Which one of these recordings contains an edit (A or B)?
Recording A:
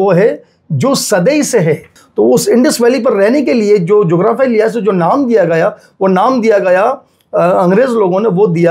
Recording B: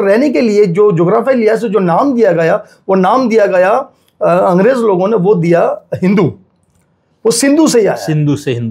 A